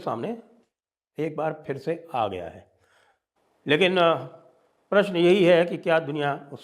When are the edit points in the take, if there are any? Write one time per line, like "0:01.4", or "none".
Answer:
none